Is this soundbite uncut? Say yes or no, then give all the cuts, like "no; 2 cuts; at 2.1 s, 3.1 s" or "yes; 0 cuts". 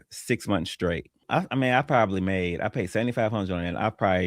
no; 1 cut; at 1.2 s